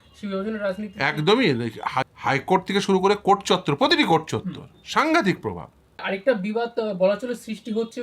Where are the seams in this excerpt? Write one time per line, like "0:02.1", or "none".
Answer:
0:02.0
0:06.0